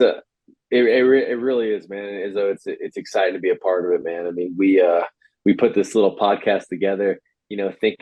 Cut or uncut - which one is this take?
uncut